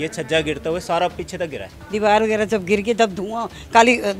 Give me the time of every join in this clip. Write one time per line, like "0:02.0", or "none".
0:01.8